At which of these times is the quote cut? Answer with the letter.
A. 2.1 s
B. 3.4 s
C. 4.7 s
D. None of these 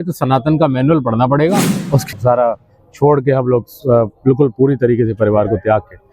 A